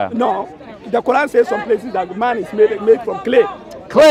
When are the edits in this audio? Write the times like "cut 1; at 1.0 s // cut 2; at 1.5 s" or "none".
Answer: none

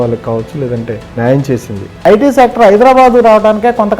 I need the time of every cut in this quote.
cut 1; at 1.0 s // cut 2; at 1.9 s

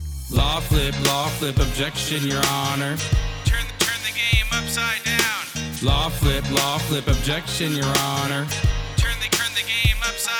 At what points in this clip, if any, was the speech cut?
none

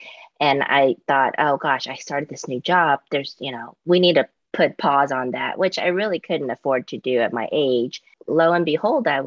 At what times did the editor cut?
cut 1; at 8.2 s

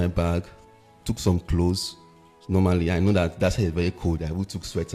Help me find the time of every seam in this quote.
none

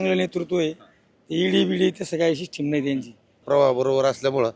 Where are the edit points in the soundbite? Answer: cut 1; at 3.4 s

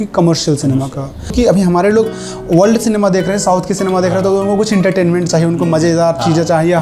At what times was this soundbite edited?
cut 1; at 1.2 s

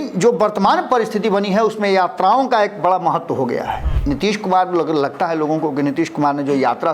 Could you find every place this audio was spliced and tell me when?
cut 1; at 3.9 s

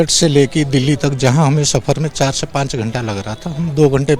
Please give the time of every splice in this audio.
none

